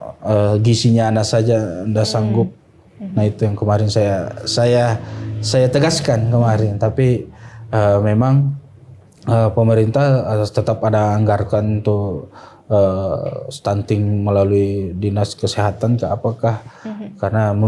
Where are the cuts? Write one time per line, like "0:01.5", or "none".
none